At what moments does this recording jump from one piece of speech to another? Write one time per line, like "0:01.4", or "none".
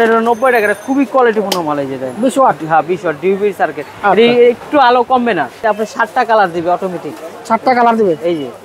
0:05.6